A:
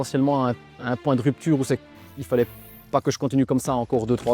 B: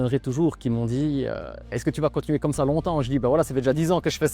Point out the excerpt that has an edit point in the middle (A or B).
B